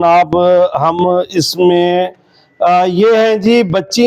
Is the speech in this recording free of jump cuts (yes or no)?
yes